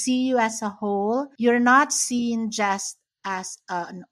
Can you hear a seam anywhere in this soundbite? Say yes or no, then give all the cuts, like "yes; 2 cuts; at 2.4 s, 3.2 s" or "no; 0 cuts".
yes; 1 cut; at 1.3 s